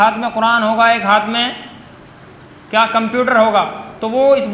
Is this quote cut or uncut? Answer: uncut